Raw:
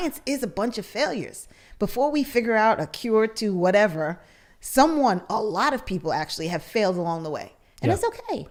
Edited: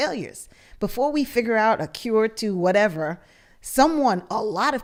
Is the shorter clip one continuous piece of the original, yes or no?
yes